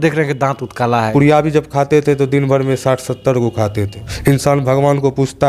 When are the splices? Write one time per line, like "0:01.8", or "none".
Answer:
0:01.1
0:04.0